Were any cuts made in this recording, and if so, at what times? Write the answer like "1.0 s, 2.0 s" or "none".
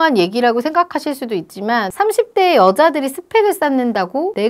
1.9 s